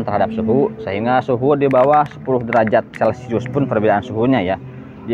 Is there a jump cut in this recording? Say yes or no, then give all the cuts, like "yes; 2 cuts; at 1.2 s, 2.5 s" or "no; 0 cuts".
no; 0 cuts